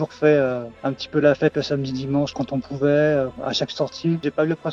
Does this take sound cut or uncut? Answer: cut